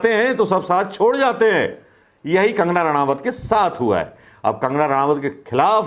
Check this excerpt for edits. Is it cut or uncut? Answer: uncut